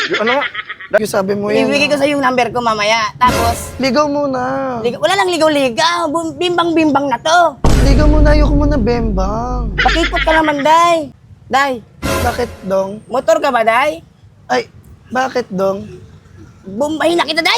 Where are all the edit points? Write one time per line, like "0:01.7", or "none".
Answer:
0:01.0
0:11.2